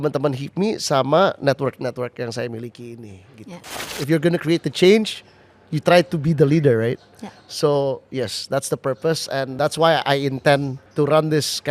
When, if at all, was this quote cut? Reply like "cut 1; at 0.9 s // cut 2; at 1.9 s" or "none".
cut 1; at 3.9 s // cut 2; at 9.5 s // cut 3; at 10.8 s